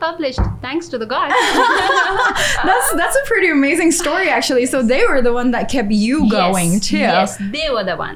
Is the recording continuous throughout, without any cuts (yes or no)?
yes